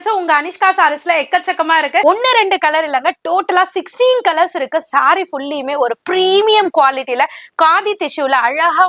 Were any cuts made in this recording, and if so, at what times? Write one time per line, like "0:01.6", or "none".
0:02.0